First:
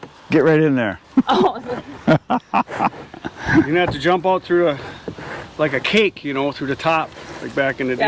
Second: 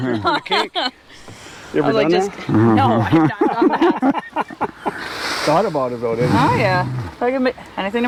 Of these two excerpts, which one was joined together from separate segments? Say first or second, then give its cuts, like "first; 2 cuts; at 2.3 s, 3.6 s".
first; 1 cut; at 1.1 s